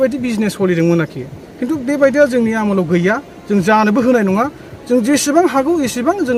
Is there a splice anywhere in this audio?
no; 0 cuts

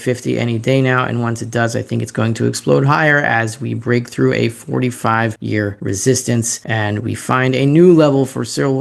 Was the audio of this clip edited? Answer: yes; 2 cuts; at 5.6 s, 6.6 s

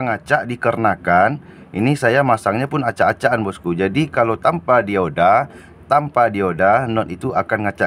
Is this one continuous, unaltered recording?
yes; 0 cuts

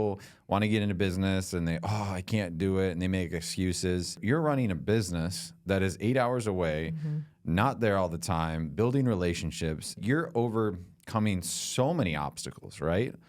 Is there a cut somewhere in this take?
yes; 2 cuts; at 4.2 s, 10.0 s

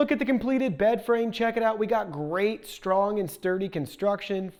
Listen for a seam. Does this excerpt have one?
no; 0 cuts

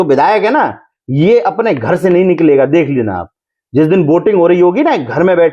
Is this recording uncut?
yes; 0 cuts

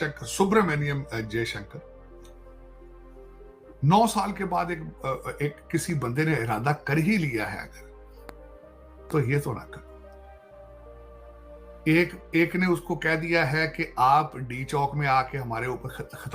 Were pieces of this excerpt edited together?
yes; 2 cuts; at 1.8 s, 3.7 s

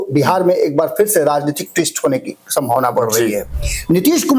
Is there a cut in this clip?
yes; 1 cut; at 3.5 s

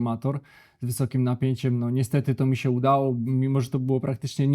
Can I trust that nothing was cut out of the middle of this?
yes; 0 cuts

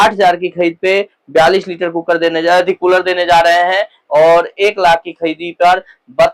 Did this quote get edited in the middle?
no; 0 cuts

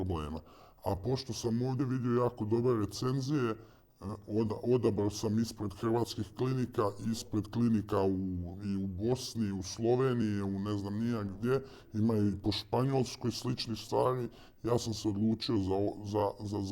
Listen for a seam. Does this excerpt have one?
no; 0 cuts

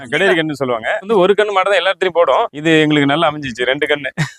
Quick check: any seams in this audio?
yes; 2 cuts; at 1.0 s, 2.6 s

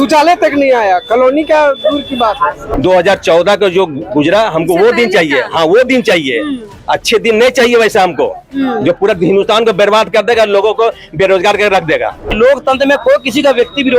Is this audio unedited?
no; 2 cuts; at 2.6 s, 12.4 s

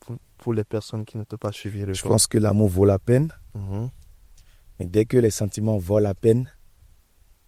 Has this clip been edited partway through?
no; 0 cuts

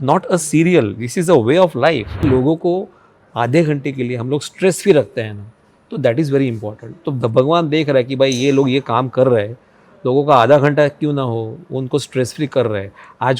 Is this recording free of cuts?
no; 1 cut; at 2.2 s

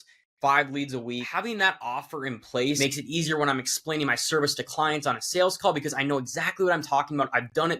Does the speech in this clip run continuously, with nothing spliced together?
no; 2 cuts; at 1.3 s, 2.8 s

